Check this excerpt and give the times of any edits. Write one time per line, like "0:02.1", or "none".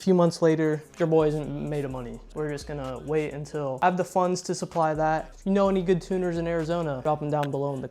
0:00.9
0:02.2
0:03.8
0:05.3
0:07.0

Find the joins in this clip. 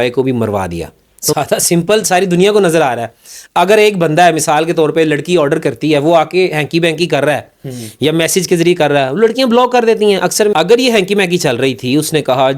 0:01.3
0:10.5

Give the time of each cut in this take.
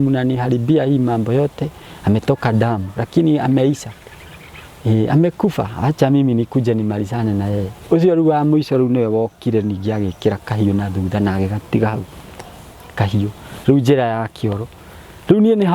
none

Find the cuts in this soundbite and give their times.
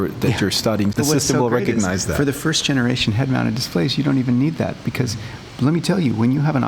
0:00.9

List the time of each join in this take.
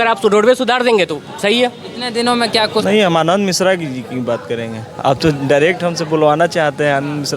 0:02.8

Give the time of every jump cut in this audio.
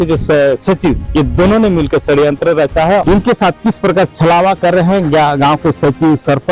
0:03.0

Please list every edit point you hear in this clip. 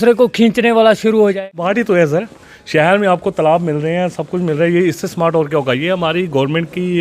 0:01.4

